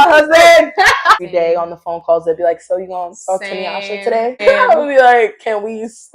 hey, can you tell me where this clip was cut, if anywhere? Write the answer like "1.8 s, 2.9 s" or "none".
1.2 s, 4.4 s